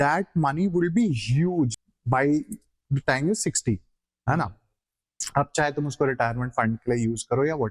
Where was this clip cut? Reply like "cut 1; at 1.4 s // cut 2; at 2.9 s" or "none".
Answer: cut 1; at 1.7 s